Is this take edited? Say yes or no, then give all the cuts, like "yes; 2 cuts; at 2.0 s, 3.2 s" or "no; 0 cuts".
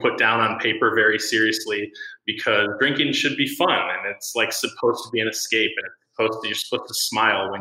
no; 0 cuts